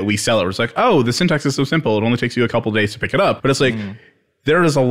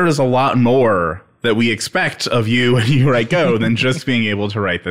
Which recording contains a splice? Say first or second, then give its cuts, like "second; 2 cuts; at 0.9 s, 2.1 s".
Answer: first; 1 cut; at 3.4 s